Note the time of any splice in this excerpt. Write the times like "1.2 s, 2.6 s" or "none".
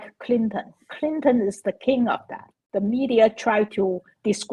2.6 s